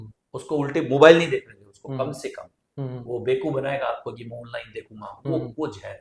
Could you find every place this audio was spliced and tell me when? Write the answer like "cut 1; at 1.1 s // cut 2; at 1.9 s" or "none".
none